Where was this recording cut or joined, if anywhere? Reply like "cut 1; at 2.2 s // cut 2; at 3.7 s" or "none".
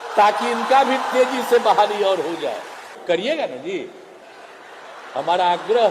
cut 1; at 3.0 s

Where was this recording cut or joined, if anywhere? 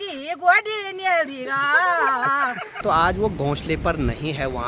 cut 1; at 2.8 s

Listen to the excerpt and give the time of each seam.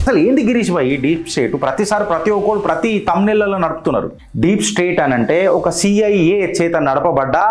cut 1; at 4.2 s

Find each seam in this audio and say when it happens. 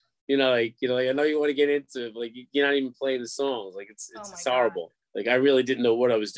cut 1; at 5.0 s

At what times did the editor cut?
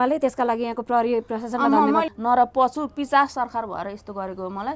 cut 1; at 2.1 s

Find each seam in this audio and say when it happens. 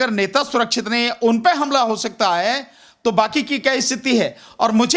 none

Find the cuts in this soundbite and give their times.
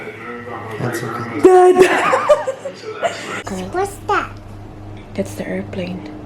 cut 1; at 3.4 s

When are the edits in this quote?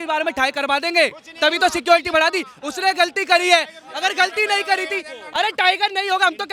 none

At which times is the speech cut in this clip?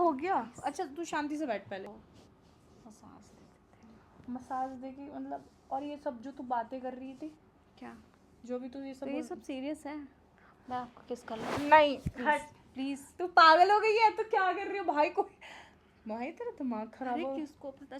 cut 1; at 2.0 s

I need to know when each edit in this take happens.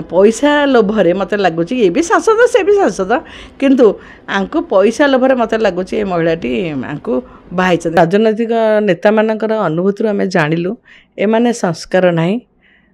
cut 1; at 8.0 s

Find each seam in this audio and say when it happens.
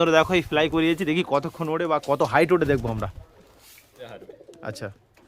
cut 1; at 4.1 s

